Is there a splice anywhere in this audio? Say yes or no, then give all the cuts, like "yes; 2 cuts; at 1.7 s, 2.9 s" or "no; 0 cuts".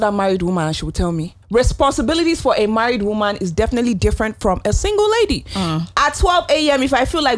yes; 1 cut; at 1.3 s